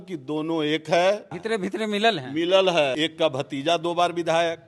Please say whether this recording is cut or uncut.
cut